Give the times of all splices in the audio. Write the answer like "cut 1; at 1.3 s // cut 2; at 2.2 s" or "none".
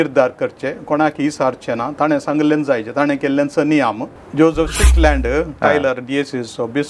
cut 1; at 4.1 s

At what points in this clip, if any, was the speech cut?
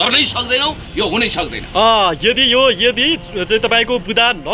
none

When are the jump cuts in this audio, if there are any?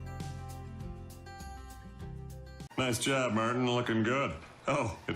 cut 1; at 2.6 s

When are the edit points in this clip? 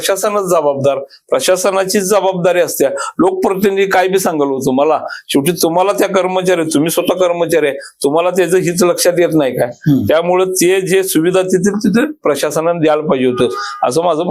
none

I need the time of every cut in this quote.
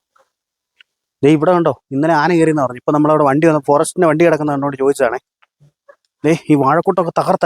none

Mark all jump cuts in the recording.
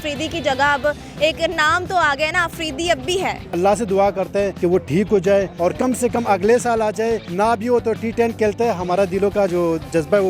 cut 1; at 3.5 s // cut 2; at 4.5 s // cut 3; at 5.5 s // cut 4; at 7.3 s

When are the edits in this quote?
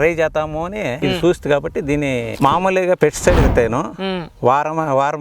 cut 1; at 0.9 s // cut 2; at 2.3 s

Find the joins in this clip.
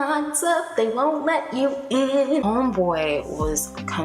cut 1; at 2.4 s

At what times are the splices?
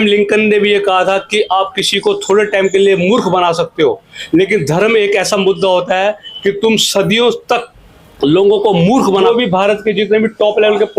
cut 1; at 9.3 s

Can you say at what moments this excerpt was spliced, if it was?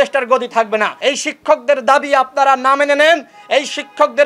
cut 1; at 0.9 s

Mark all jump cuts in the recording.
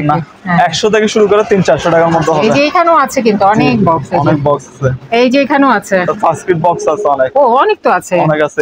none

